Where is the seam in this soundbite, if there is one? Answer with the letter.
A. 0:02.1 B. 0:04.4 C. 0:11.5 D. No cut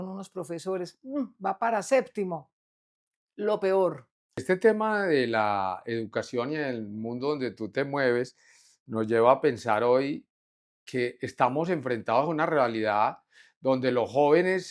B